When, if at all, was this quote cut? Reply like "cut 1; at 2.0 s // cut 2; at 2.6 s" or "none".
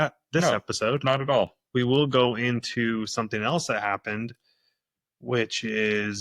none